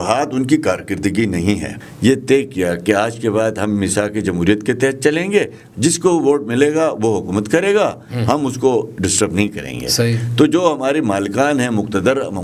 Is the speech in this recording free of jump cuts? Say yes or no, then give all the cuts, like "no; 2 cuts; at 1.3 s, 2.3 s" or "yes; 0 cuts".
no; 1 cut; at 1.8 s